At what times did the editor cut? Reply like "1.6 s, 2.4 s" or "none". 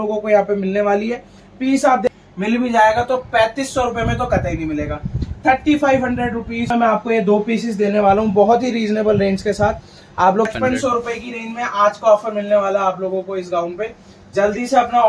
2.1 s, 6.7 s, 10.5 s